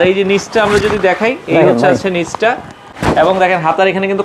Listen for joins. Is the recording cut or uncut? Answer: cut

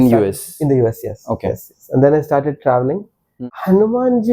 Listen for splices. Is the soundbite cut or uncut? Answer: cut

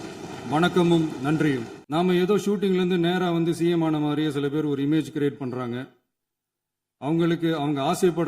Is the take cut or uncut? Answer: cut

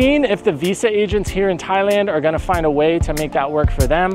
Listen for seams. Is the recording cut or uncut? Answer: uncut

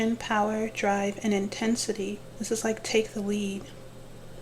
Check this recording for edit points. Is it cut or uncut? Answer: cut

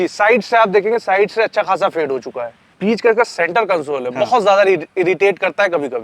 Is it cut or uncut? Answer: cut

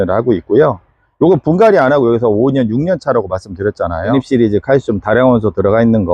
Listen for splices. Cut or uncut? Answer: cut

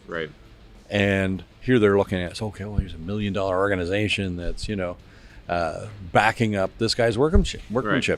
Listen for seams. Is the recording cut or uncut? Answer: cut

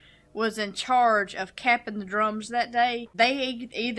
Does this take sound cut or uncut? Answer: cut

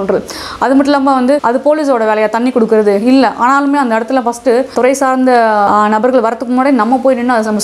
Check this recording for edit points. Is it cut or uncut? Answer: cut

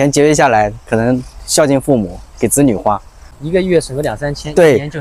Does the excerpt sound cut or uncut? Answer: uncut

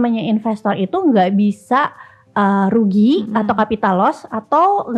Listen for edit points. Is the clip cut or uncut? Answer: uncut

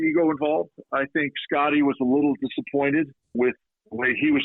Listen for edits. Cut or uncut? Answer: cut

